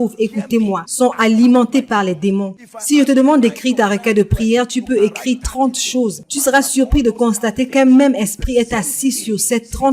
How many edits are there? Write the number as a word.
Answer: one